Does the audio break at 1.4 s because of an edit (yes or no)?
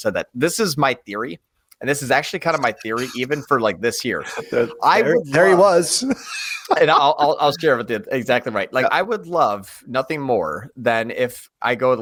no